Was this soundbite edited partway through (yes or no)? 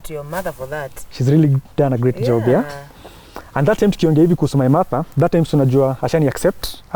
no